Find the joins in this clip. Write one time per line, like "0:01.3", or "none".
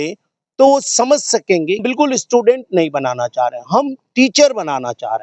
0:01.8